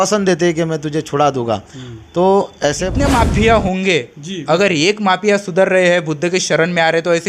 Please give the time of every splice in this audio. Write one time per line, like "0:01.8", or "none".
0:02.9